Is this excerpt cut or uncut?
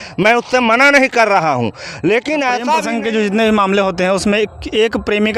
cut